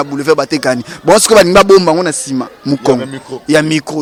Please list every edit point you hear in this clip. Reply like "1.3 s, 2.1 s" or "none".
none